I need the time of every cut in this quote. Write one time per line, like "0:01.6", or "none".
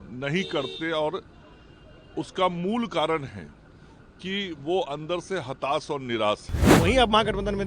0:06.7